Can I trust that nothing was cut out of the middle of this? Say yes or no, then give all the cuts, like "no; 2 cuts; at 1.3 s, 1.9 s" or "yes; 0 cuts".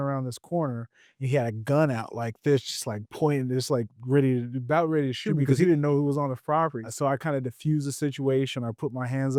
yes; 0 cuts